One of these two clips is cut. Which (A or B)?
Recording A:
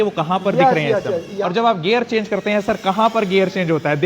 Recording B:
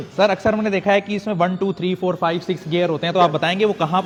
A